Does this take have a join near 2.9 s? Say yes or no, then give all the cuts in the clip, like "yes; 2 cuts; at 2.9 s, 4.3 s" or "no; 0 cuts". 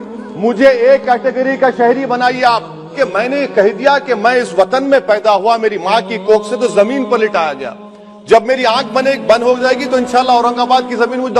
yes; 1 cut; at 2.9 s